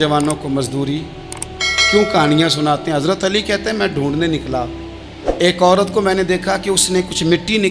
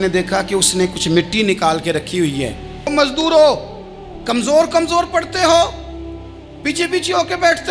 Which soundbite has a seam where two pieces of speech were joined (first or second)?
second